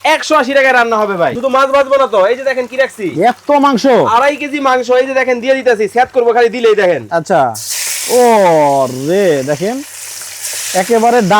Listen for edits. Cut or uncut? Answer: cut